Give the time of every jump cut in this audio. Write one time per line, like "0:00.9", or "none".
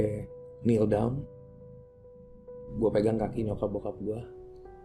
none